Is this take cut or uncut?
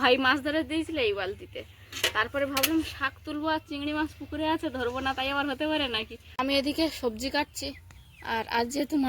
cut